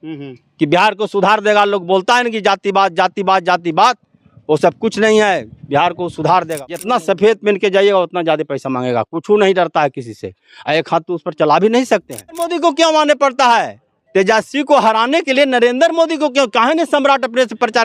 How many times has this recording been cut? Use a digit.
2